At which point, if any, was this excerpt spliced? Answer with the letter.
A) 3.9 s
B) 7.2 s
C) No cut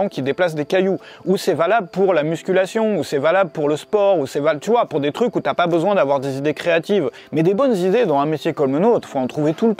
B